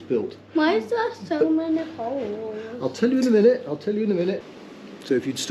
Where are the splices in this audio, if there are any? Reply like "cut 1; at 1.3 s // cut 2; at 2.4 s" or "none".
cut 1; at 4.5 s